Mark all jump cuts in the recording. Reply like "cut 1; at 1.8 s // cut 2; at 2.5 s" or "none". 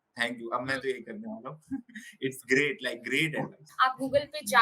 cut 1; at 3.6 s